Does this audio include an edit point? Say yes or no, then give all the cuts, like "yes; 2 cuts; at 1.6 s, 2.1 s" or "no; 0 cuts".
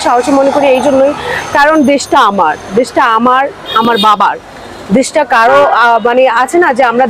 no; 0 cuts